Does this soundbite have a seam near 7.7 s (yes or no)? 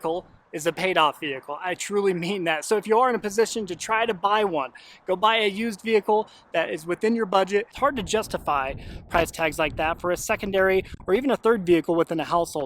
yes